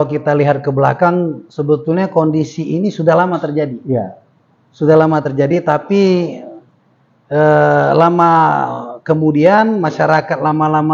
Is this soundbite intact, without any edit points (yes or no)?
yes